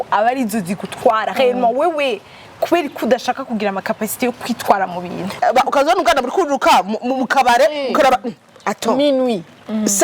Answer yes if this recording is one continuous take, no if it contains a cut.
no